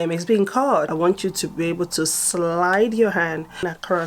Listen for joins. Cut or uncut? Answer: cut